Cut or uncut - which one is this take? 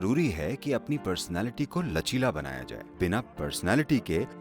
cut